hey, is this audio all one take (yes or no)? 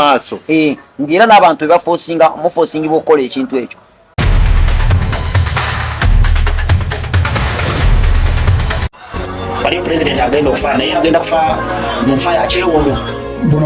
no